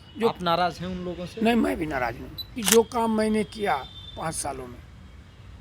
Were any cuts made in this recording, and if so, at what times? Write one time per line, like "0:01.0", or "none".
0:02.6